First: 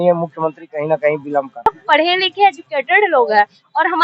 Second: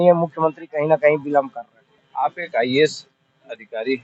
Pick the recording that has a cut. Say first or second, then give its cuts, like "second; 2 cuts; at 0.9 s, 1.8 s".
first; 1 cut; at 1.7 s